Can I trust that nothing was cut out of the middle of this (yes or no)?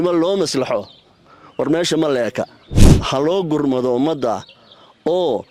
no